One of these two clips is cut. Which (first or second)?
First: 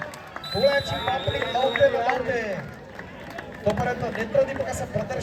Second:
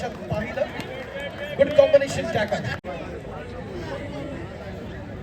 second